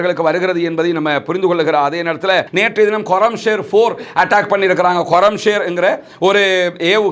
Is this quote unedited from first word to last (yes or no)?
no